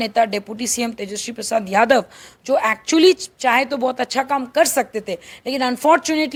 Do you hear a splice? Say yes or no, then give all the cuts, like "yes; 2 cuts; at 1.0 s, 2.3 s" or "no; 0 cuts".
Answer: no; 0 cuts